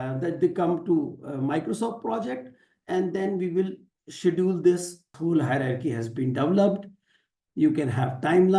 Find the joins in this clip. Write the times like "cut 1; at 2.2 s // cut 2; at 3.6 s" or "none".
cut 1; at 5.1 s